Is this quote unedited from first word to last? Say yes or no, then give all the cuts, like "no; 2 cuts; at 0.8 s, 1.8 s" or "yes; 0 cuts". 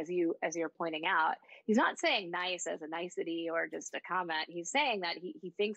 yes; 0 cuts